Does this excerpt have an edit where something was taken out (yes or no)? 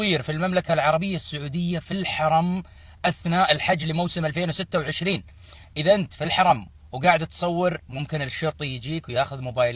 no